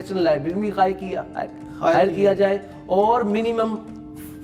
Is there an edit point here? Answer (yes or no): no